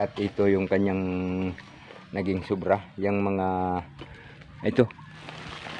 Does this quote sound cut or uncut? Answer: uncut